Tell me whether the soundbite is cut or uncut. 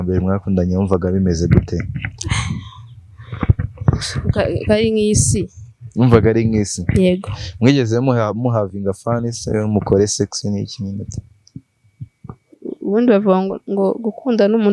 uncut